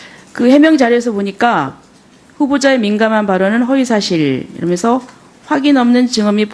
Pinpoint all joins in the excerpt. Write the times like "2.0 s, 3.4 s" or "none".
4.5 s